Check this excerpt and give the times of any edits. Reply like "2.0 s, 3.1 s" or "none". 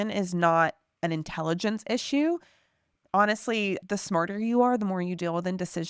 3.8 s

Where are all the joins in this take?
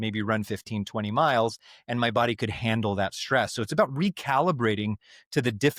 none

